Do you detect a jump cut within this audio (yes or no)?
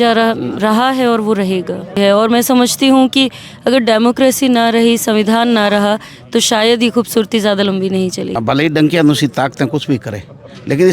yes